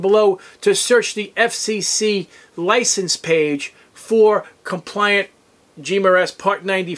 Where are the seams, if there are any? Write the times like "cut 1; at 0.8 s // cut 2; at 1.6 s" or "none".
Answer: none